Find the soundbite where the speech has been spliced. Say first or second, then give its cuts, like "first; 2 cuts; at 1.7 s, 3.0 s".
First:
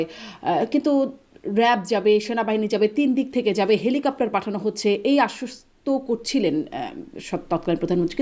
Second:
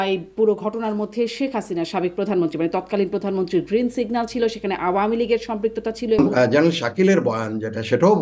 second; 1 cut; at 6.2 s